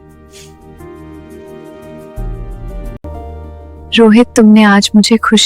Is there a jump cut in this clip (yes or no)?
yes